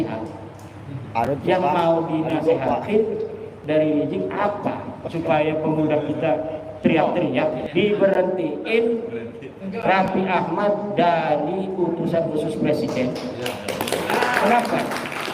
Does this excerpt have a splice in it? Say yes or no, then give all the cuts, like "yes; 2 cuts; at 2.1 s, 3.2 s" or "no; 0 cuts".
yes; 1 cut; at 7.6 s